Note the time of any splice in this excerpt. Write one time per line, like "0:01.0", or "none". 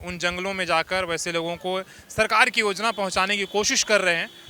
none